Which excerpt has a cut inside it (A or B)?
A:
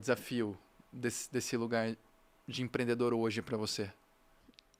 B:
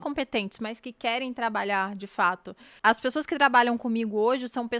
B